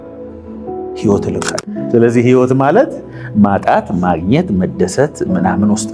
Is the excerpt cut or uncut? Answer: cut